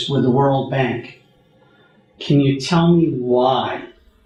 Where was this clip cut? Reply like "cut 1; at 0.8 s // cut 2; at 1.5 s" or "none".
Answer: none